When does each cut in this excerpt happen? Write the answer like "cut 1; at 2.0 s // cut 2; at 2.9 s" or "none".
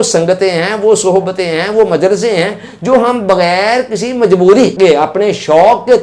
cut 1; at 4.7 s

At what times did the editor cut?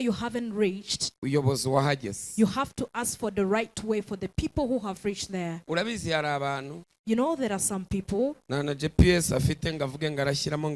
none

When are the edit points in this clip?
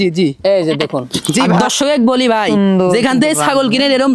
cut 1; at 1.5 s

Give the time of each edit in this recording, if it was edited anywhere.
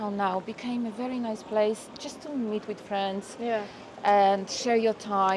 none

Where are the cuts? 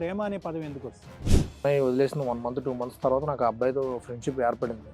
cut 1; at 1.6 s

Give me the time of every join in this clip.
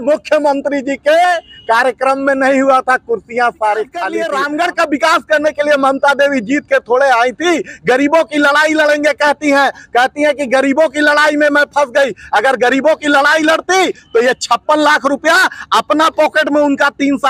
cut 1; at 4.2 s

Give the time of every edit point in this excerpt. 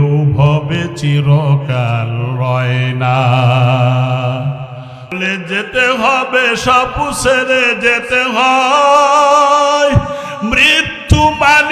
cut 1; at 5.1 s

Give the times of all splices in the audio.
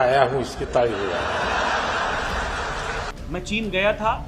cut 1; at 3.1 s

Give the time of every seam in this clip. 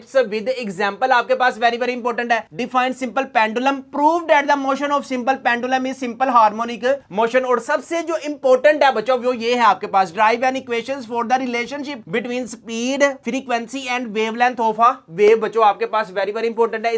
none

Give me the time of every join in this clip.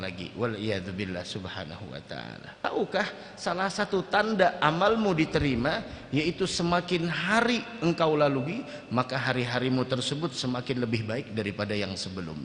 cut 1; at 2.6 s

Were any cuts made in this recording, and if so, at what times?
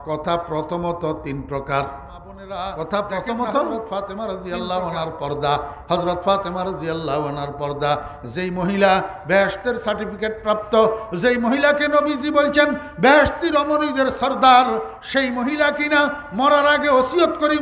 cut 1; at 3.8 s

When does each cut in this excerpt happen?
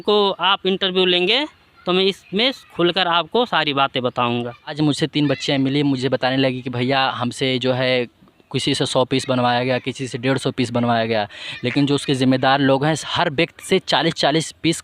cut 1; at 4.7 s

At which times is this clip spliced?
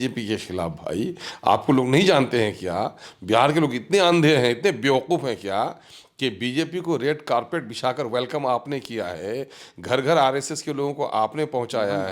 none

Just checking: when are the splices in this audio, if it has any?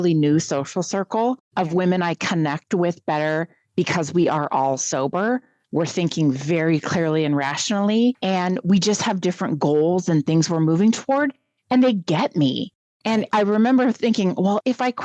cut 1; at 1.4 s // cut 2; at 8.2 s

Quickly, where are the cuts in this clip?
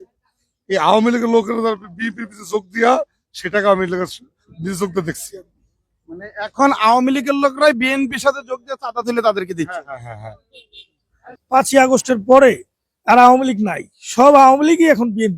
cut 1; at 11.3 s

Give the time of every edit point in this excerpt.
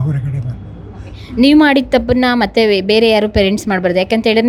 none

